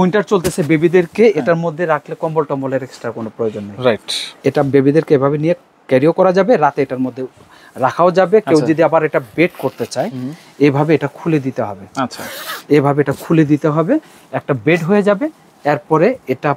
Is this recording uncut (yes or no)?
yes